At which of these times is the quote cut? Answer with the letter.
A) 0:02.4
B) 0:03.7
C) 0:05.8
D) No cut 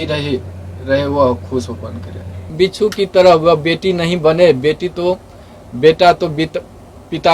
A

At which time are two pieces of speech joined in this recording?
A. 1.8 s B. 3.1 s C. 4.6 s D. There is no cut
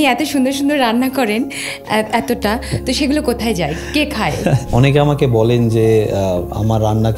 C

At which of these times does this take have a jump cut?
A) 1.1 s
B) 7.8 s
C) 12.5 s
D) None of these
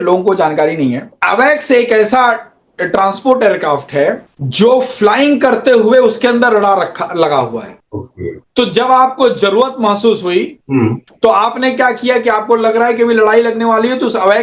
A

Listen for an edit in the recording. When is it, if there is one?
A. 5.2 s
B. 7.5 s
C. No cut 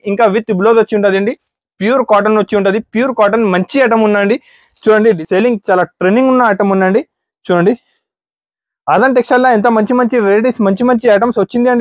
A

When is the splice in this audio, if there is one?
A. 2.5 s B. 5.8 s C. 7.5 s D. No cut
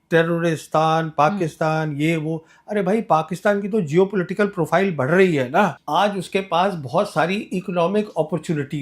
B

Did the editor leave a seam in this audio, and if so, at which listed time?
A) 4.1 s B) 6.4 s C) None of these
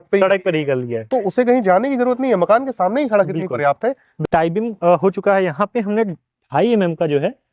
A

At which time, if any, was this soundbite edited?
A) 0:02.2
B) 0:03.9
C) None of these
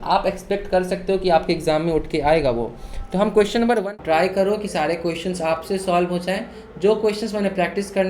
B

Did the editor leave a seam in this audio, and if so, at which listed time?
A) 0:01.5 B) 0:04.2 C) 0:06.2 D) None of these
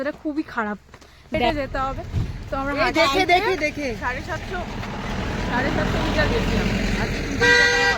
A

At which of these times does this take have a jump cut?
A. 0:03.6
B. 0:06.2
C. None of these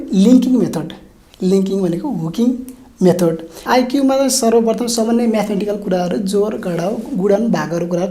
A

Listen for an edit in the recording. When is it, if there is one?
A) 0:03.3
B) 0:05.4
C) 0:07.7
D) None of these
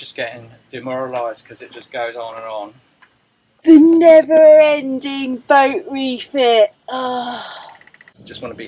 C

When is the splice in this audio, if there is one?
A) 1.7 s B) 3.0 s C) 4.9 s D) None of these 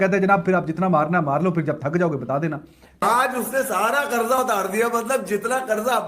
B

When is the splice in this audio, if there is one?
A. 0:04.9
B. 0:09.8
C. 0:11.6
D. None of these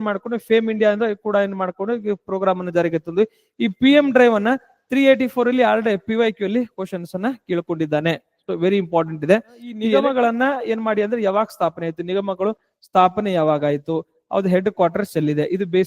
B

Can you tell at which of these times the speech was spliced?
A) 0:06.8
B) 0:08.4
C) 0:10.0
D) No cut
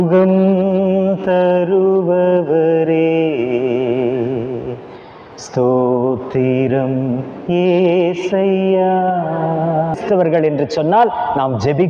C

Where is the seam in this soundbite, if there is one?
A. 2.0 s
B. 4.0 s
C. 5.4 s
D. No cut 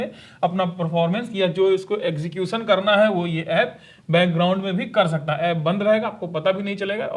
D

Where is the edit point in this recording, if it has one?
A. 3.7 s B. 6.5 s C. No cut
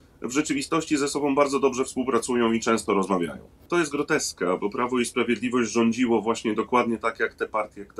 A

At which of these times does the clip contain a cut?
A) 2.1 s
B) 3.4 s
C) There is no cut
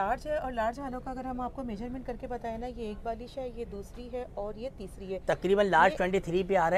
C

